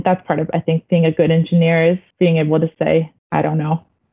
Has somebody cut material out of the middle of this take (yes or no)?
yes